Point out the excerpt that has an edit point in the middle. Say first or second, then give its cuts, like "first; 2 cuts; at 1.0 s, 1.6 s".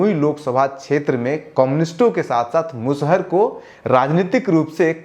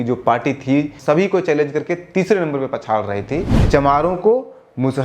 second; 2 cuts; at 1.0 s, 3.5 s